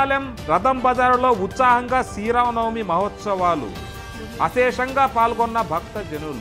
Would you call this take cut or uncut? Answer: uncut